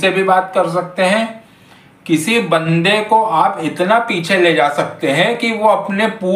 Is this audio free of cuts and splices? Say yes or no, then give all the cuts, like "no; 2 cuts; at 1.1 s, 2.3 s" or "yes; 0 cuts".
yes; 0 cuts